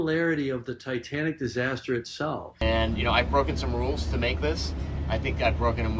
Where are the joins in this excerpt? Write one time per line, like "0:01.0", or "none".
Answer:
0:02.6